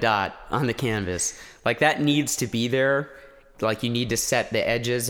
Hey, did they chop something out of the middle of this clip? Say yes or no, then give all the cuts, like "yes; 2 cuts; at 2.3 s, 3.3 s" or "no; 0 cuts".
no; 0 cuts